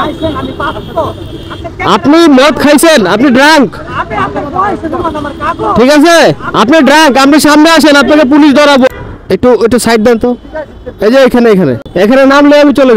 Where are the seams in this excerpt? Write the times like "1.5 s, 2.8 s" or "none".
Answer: 8.9 s, 11.8 s